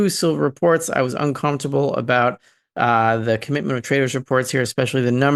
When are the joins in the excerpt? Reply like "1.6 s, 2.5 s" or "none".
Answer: none